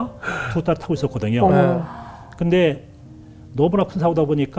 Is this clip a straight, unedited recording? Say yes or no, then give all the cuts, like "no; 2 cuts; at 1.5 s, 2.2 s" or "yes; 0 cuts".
yes; 0 cuts